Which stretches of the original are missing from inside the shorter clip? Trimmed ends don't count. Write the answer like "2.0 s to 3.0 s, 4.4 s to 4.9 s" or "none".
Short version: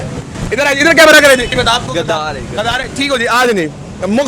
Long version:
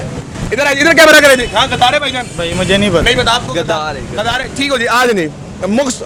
1.5 s to 3.1 s